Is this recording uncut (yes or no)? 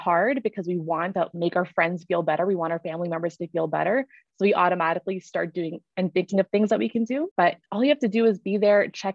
no